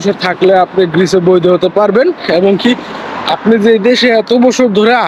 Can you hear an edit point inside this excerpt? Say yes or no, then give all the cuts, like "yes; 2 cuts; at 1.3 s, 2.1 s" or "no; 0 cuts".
no; 0 cuts